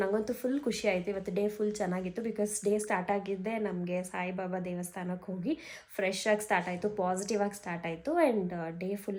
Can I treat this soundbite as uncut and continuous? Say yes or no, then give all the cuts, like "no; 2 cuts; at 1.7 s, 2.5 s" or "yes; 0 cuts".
yes; 0 cuts